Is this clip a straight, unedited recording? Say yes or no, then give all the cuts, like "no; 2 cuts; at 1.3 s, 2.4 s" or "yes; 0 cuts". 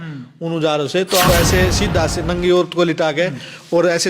no; 1 cut; at 1.3 s